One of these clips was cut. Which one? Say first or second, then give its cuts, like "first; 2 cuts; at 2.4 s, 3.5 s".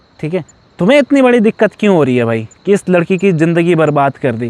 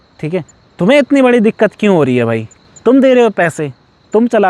second; 1 cut; at 2.5 s